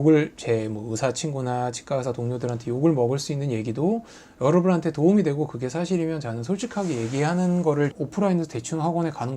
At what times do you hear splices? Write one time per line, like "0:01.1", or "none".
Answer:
0:07.9